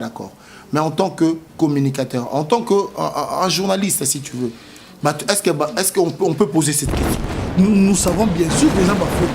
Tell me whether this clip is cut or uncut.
cut